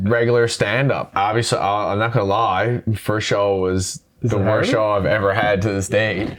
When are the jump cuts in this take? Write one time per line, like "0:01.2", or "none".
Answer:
0:01.1
0:02.9